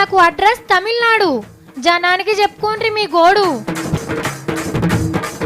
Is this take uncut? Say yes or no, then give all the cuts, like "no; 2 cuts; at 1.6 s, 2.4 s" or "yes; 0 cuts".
no; 1 cut; at 4.0 s